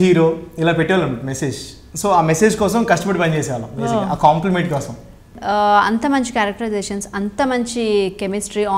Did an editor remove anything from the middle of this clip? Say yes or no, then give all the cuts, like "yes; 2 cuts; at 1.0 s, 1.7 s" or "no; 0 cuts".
yes; 1 cut; at 5.4 s